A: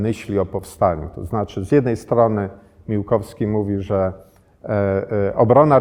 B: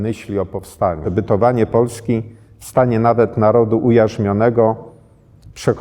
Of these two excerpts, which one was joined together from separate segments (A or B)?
B